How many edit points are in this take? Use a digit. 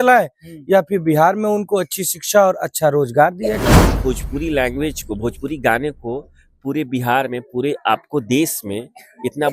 1